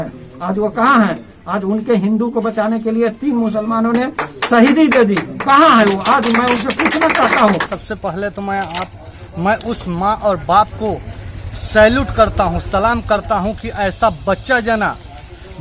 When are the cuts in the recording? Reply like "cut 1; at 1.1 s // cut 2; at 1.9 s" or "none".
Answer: cut 1; at 7.7 s